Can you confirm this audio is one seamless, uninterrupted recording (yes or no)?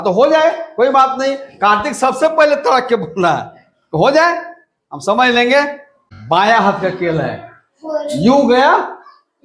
no